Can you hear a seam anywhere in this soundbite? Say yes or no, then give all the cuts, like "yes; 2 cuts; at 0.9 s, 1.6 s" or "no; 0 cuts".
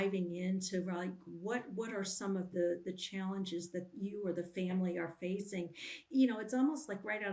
no; 0 cuts